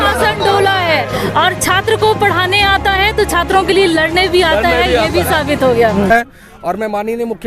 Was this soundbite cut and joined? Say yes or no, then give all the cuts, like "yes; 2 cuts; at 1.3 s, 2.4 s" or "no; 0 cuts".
yes; 1 cut; at 6.1 s